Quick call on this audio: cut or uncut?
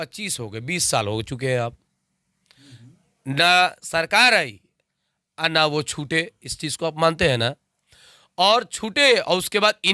uncut